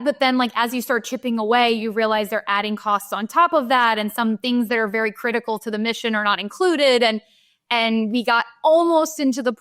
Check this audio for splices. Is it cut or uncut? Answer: uncut